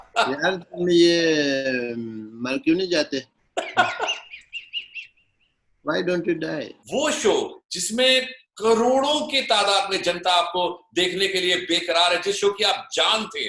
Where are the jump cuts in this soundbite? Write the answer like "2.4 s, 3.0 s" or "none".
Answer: 6.8 s